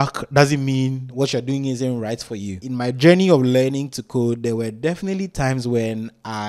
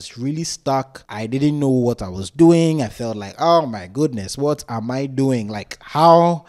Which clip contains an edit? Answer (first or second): first